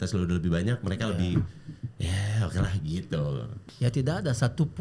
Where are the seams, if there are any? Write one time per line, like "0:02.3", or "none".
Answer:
0:03.5